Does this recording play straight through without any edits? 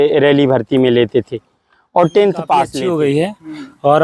no; 1 cut; at 2.8 s

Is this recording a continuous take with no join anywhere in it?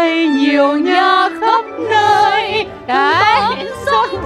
yes; 0 cuts

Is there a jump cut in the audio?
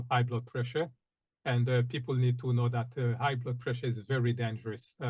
no; 0 cuts

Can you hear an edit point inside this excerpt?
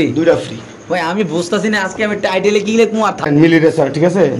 yes; 1 cut; at 3.3 s

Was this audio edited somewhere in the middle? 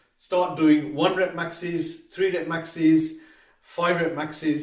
no; 0 cuts

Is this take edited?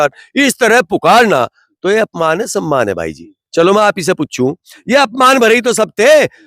no; 0 cuts

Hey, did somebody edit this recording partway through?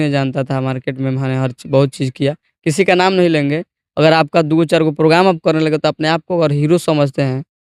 no; 0 cuts

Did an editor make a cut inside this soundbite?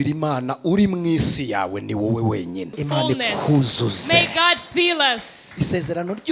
yes; 1 cut; at 2.7 s

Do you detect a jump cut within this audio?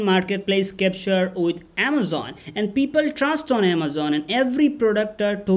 no; 0 cuts

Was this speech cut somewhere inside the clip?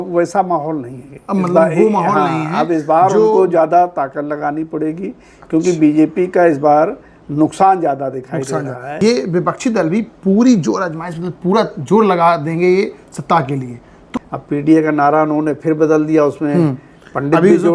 yes; 2 cuts; at 8.8 s, 14.2 s

